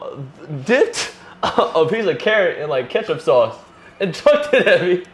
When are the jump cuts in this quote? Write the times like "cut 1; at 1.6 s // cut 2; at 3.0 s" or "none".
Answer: none